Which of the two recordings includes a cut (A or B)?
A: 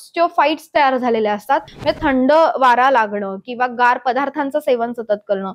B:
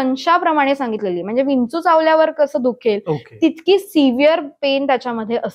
A